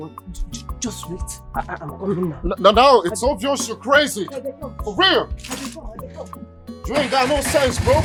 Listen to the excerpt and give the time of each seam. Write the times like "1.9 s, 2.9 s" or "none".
none